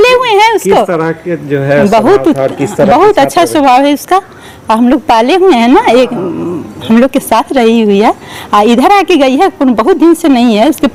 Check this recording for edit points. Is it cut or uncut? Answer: uncut